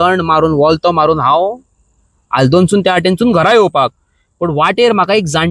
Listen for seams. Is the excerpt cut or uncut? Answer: uncut